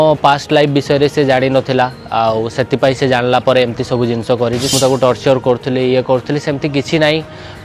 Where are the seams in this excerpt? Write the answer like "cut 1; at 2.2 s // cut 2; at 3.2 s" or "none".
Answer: cut 1; at 4.7 s